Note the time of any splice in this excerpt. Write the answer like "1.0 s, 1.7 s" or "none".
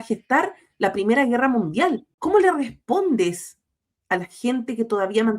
2.1 s